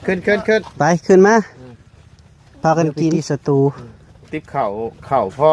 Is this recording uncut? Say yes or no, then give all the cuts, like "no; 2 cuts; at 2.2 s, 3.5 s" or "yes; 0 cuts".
no; 1 cut; at 3.2 s